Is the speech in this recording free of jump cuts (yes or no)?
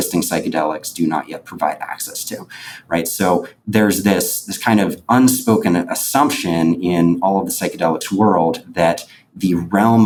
yes